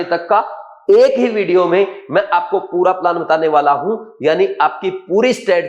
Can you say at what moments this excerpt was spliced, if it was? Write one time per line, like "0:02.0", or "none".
none